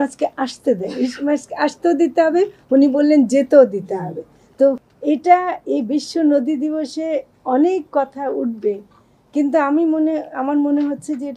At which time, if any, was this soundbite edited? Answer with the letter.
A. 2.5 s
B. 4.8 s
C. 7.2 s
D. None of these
B